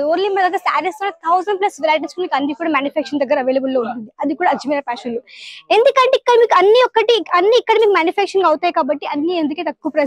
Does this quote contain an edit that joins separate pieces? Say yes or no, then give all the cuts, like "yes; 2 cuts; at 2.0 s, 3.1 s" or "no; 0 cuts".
no; 0 cuts